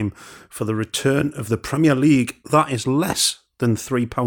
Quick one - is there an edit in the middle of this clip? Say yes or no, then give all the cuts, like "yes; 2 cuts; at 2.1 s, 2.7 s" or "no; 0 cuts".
no; 0 cuts